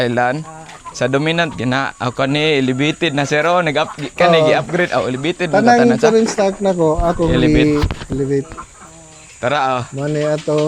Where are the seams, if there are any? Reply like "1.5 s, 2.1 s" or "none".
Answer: none